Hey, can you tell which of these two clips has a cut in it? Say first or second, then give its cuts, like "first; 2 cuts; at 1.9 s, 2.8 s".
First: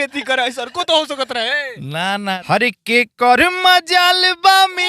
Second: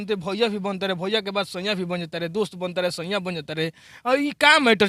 first; 1 cut; at 2.2 s